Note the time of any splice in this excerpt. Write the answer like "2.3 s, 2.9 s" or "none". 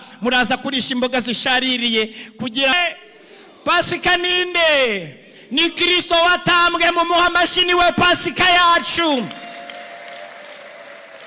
2.7 s